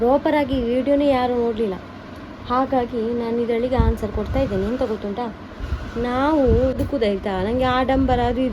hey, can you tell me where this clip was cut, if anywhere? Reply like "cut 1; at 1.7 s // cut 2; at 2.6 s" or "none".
cut 1; at 6.8 s